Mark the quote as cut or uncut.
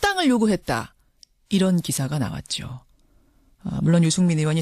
cut